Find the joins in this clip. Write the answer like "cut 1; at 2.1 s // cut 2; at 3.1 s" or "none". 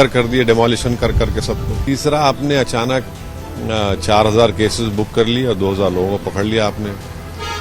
cut 1; at 1.7 s